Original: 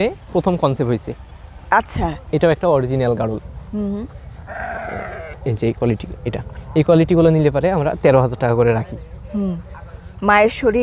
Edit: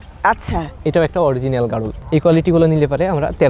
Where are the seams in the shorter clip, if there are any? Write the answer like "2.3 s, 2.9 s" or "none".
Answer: 1.9 s